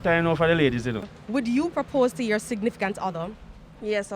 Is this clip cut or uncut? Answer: cut